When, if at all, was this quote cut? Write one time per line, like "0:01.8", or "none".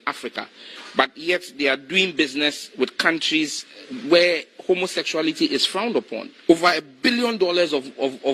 none